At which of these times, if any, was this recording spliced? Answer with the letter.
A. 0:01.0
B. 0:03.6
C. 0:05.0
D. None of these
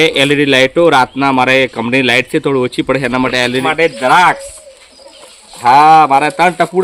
B